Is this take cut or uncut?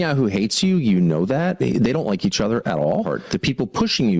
uncut